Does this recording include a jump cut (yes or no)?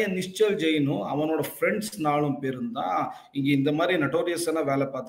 no